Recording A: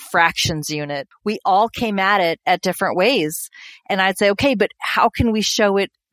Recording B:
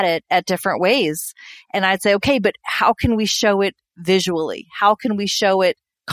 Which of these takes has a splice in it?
A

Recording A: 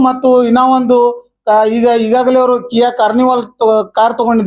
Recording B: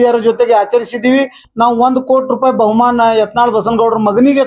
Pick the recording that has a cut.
B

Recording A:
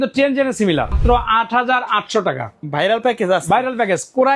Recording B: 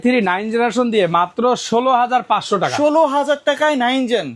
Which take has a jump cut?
A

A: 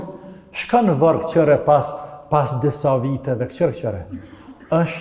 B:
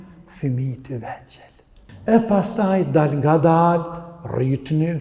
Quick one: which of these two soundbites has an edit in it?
B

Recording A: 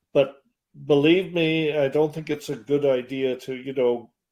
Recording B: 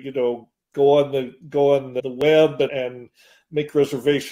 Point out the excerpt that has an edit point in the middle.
B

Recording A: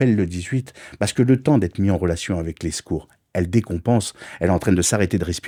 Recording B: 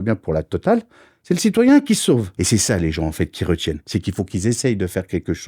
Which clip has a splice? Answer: B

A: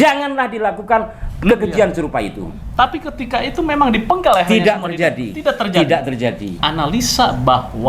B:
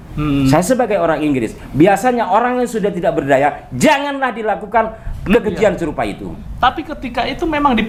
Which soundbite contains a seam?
A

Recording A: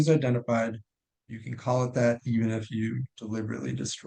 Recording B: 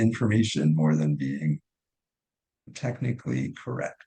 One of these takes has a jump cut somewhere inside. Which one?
B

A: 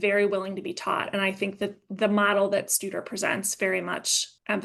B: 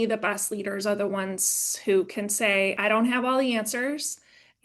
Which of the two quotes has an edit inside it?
B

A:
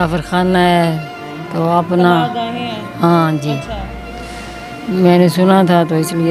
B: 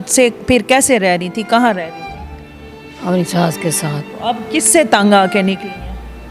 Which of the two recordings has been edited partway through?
B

